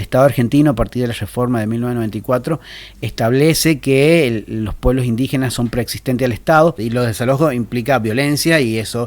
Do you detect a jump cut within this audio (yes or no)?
yes